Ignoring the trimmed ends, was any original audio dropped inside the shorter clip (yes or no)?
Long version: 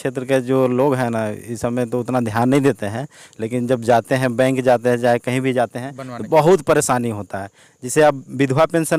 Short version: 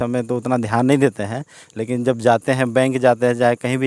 no